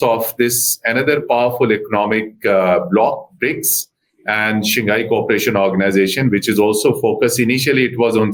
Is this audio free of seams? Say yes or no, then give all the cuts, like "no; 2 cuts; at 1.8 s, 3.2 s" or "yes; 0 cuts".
yes; 0 cuts